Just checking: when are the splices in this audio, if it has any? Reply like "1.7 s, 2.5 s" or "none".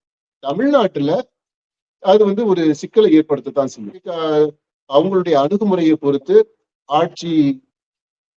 4.2 s